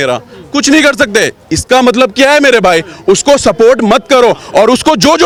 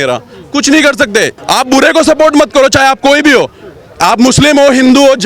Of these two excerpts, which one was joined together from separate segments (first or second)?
second